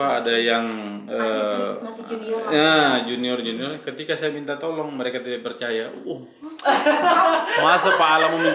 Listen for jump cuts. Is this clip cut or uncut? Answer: uncut